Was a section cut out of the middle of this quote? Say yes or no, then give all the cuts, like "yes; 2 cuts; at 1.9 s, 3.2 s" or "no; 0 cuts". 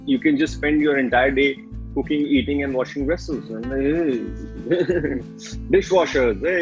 no; 0 cuts